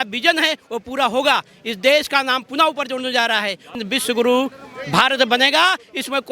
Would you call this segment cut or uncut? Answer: cut